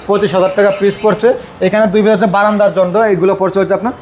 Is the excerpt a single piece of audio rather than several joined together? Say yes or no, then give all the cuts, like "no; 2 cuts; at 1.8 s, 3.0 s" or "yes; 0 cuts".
yes; 0 cuts